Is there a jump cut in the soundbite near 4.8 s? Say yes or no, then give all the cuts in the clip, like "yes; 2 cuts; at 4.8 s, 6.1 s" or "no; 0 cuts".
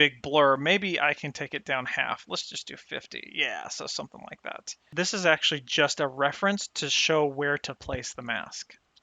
yes; 1 cut; at 4.8 s